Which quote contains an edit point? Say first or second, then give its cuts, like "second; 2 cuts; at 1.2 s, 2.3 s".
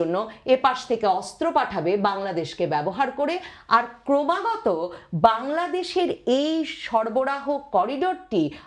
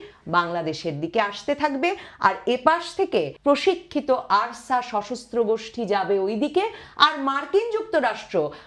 second; 1 cut; at 3.3 s